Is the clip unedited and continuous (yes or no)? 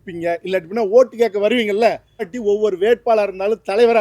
no